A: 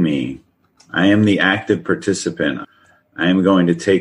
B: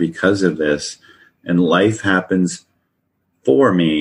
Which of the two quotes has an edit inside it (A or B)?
A